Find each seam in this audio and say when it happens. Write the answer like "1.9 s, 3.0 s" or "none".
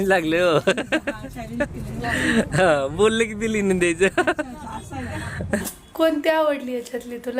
5.6 s